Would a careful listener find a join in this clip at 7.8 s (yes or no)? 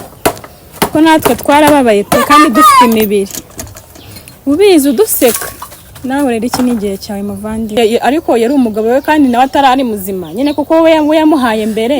yes